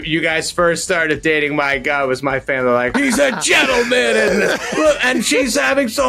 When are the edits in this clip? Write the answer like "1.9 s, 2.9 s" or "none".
2.9 s